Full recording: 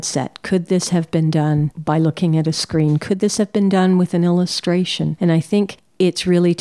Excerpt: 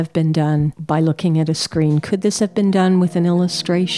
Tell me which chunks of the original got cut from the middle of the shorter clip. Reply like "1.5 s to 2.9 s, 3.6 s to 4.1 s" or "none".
none

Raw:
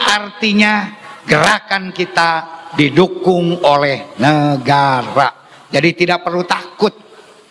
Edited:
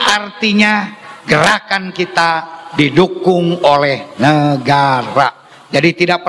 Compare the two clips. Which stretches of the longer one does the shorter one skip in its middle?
none

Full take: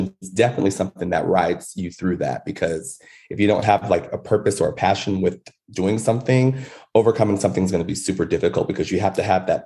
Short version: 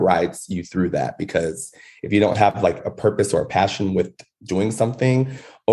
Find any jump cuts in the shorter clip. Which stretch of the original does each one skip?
none

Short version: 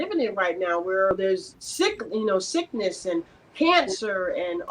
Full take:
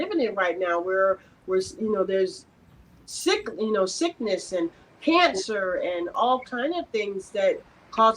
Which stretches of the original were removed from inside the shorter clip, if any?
1.1 s to 2.6 s

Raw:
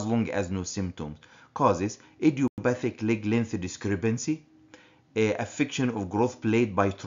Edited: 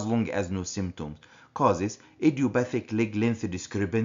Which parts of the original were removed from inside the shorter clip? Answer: 2.5 s to 2.6 s

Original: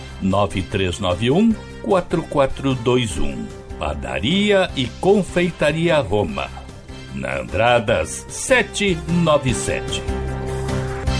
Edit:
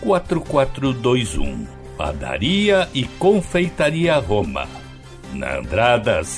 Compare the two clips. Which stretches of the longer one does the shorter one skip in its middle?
none

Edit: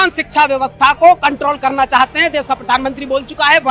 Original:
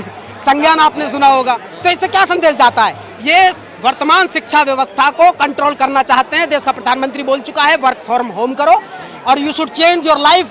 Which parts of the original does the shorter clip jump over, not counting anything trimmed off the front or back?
none

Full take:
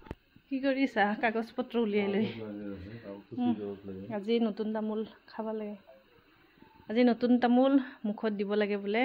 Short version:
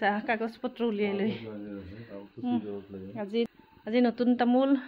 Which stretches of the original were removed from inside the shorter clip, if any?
4.4 s to 6.5 s

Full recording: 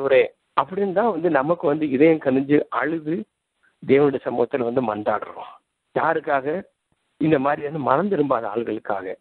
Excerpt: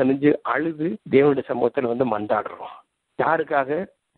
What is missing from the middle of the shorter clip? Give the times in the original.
3.3 s to 3.7 s

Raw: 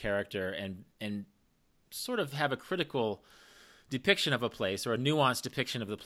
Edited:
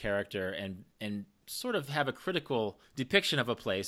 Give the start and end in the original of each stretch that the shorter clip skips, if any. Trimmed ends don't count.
1.4 s to 1.9 s, 3.3 s to 3.8 s

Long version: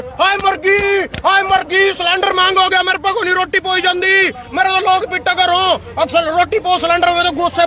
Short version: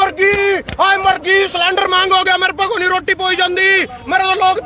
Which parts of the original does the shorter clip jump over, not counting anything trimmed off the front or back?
none

